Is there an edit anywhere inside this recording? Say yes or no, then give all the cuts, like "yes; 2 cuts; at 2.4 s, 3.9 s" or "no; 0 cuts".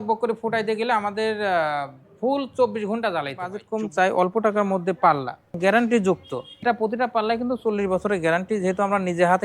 yes; 3 cuts; at 3.6 s, 5.6 s, 6.6 s